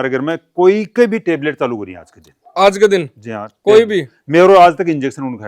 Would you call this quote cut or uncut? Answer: uncut